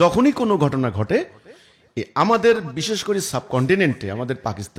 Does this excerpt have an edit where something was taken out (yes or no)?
no